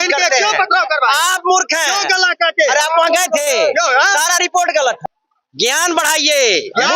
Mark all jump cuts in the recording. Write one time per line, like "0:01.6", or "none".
0:05.0